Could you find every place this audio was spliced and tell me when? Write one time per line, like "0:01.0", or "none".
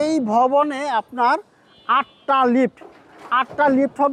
none